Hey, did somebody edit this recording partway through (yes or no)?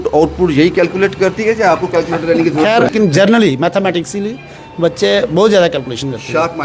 yes